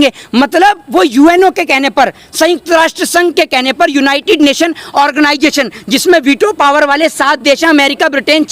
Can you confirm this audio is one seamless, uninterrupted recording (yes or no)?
yes